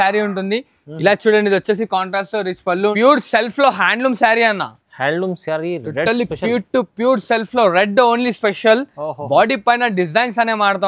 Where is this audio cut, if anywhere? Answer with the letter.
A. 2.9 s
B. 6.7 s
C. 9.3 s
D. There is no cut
A